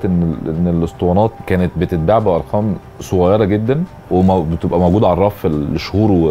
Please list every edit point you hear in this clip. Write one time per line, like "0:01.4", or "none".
0:01.4
0:03.9